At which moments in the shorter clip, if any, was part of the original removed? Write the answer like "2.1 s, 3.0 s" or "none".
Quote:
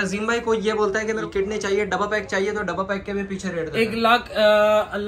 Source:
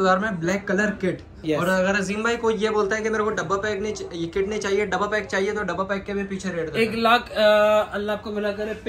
1.2 s

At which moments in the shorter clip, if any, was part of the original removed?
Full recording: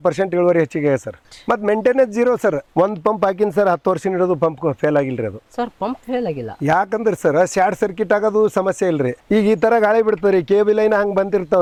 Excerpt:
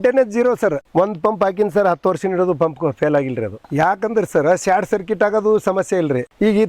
3.6 s

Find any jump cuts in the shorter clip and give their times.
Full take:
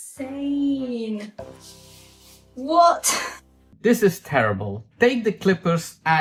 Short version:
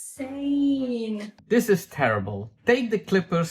1.3 s

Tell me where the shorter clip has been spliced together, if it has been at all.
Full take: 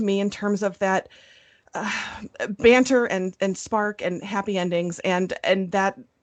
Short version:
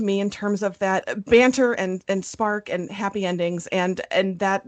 1.1 s

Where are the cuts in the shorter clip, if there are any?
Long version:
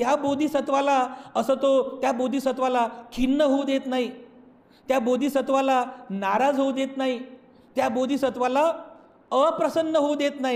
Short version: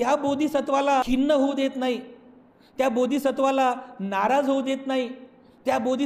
1.1 s

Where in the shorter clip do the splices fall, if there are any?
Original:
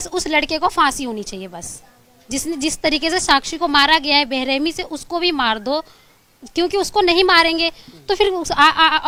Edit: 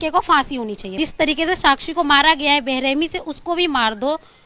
0.9 s

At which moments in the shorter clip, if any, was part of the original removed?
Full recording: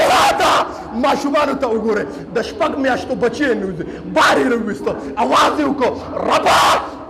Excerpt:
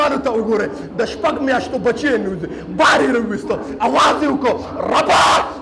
none

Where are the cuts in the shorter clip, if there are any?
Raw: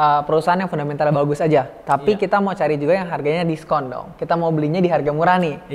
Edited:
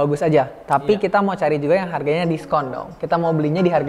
none

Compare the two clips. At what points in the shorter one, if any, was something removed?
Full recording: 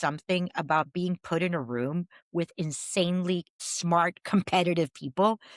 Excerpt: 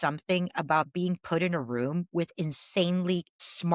2.1 s

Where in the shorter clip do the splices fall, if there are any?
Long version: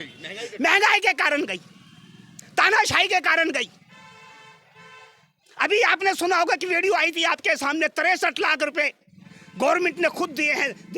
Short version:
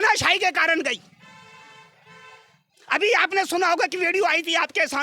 none

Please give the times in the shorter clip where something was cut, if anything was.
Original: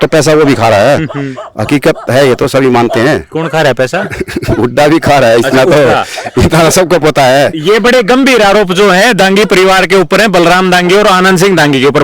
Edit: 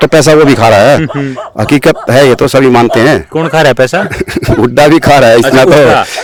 none

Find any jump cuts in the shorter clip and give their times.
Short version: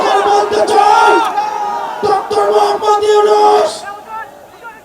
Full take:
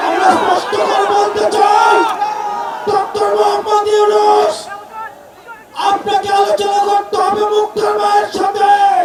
none

